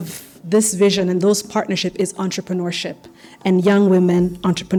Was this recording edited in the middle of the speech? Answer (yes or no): no